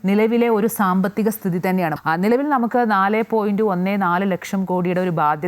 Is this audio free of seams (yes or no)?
no